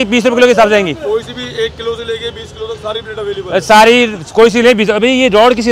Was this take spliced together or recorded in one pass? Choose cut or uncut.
uncut